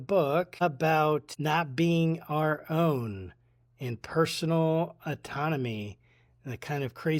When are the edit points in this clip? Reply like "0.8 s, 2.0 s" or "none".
none